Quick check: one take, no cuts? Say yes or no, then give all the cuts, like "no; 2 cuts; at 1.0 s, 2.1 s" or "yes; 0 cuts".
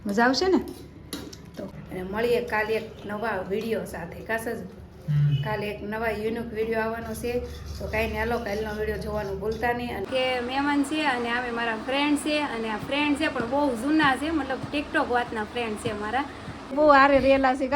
no; 3 cuts; at 1.6 s, 10.0 s, 16.7 s